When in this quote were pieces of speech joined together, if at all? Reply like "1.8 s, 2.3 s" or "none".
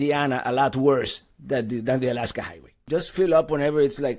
2.9 s